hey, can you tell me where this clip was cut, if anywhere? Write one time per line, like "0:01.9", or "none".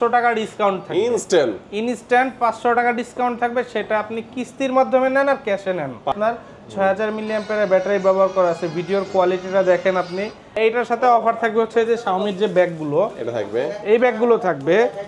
0:06.1
0:10.6

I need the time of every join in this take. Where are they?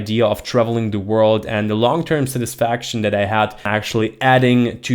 0:03.7

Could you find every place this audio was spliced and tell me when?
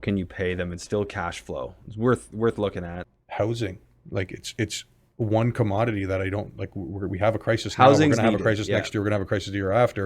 0:03.0

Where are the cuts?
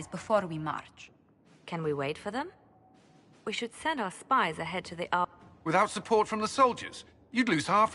0:05.3

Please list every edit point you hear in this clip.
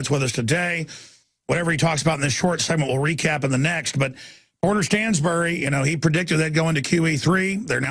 none

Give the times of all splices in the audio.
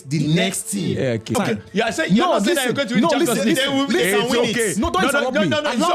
0:01.3

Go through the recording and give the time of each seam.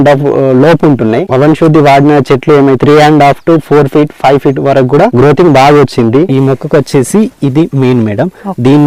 0:02.8
0:06.3

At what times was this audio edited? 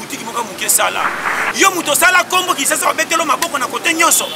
0:01.3

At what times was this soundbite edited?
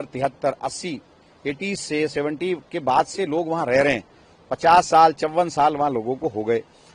none

